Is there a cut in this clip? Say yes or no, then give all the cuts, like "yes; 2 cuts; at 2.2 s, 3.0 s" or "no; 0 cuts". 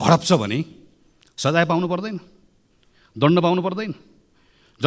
no; 0 cuts